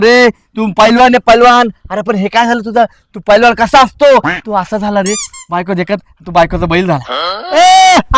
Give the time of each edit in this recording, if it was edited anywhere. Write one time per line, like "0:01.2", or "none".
none